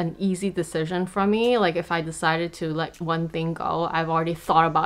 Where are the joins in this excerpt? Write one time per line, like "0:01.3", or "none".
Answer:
none